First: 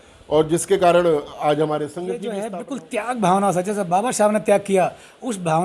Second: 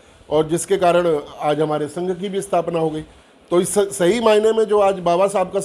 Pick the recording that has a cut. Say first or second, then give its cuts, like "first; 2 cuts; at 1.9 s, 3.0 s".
first; 1 cut; at 2.3 s